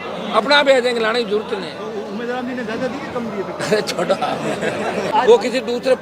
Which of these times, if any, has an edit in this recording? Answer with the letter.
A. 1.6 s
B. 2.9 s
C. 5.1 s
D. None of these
C